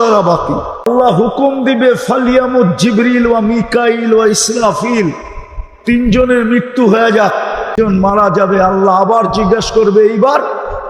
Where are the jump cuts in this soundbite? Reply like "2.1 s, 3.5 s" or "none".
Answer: 0.9 s, 7.8 s